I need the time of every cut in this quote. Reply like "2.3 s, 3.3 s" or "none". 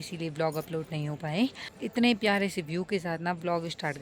1.7 s

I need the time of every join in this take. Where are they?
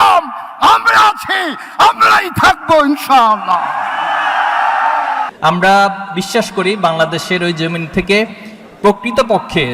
5.3 s

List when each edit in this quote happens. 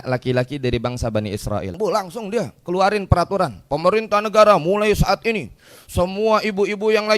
1.8 s

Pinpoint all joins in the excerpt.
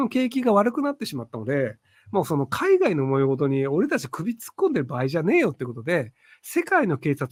none

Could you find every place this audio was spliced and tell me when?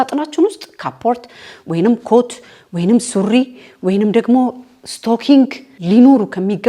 5.7 s

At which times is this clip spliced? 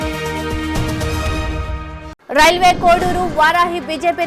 2.1 s

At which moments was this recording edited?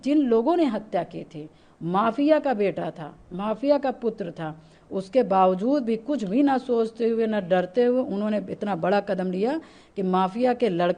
none

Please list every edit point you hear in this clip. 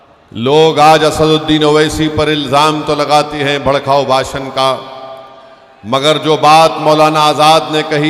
none

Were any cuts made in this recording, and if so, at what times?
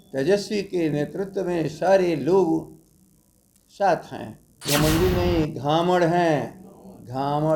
4.7 s

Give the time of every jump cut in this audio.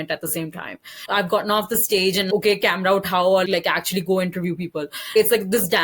1.0 s, 2.3 s, 3.5 s, 5.1 s

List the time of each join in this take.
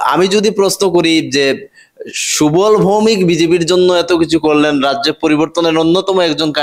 none

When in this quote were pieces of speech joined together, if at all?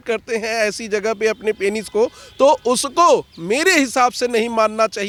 none

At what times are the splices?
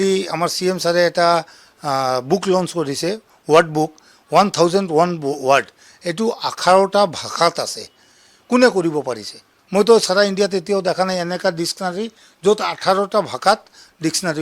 none

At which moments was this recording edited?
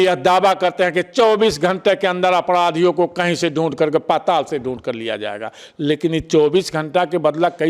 none

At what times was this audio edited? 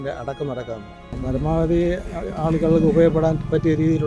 1.2 s

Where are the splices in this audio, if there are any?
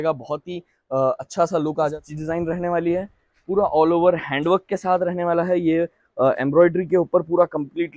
2.0 s

